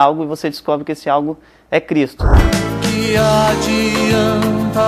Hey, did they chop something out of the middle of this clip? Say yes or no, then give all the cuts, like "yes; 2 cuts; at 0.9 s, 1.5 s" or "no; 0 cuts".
yes; 1 cut; at 2.3 s